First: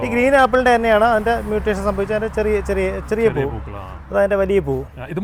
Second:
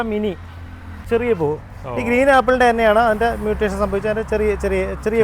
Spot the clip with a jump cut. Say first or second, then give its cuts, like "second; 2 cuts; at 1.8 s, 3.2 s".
second; 1 cut; at 1.0 s